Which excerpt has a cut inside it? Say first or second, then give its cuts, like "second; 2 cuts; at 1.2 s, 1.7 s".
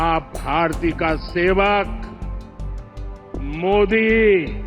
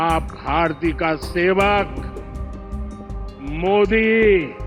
second; 2 cuts; at 1.9 s, 3.4 s